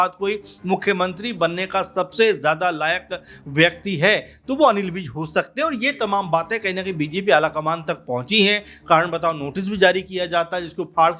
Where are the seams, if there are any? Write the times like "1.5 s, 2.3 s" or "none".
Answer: none